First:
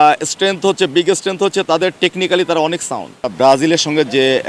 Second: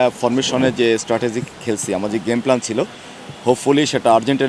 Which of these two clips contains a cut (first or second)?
first